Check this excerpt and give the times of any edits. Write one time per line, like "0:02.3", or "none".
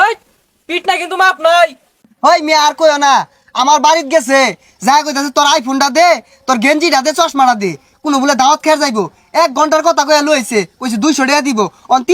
none